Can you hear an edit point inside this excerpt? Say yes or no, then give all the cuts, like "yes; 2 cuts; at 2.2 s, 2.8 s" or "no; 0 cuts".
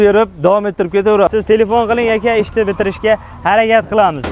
yes; 1 cut; at 1.3 s